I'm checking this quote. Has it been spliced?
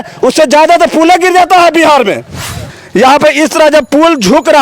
yes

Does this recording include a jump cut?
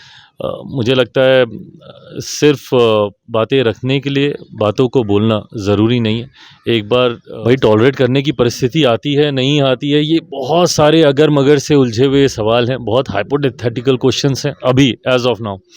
yes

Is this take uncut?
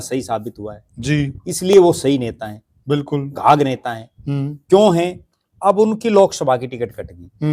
yes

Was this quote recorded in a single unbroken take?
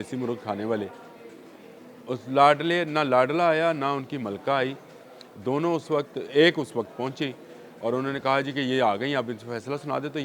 yes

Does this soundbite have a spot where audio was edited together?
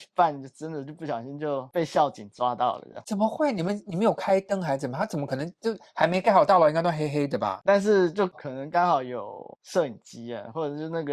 no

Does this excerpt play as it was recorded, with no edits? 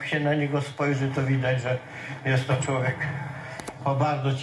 yes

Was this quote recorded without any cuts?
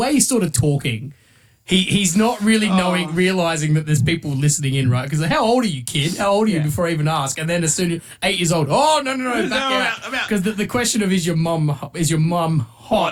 yes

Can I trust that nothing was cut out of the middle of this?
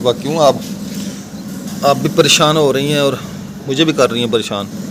yes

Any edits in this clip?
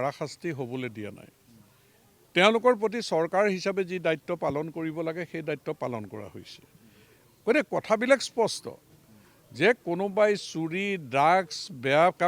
no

